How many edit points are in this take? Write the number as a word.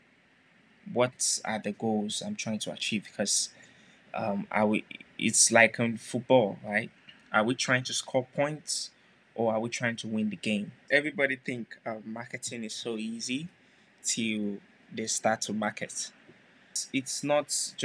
two